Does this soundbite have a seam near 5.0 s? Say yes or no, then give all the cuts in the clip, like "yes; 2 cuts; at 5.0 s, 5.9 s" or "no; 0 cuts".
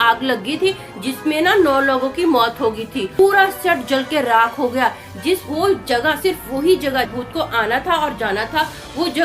no; 2 cuts; at 3.1 s, 7.1 s